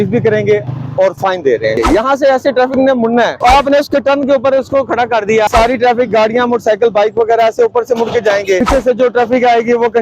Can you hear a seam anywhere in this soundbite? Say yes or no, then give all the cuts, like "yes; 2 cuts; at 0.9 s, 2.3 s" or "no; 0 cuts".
yes; 4 cuts; at 1.8 s, 3.3 s, 5.5 s, 8.6 s